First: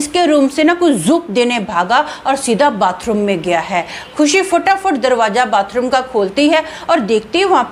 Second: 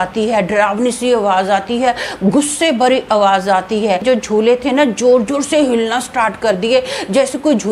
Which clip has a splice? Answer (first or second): second